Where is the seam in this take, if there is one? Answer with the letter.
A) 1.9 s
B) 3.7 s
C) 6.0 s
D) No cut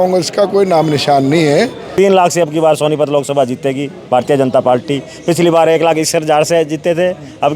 A